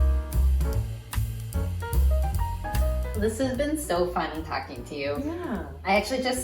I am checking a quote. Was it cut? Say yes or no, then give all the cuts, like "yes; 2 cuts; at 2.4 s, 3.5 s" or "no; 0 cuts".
yes; 1 cut; at 3.1 s